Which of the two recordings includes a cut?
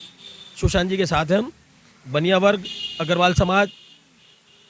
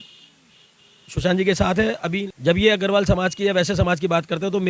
second; 1 cut; at 2.2 s

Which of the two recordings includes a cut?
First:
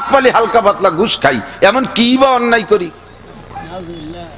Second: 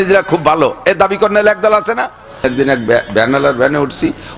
second; 1 cut; at 2.4 s

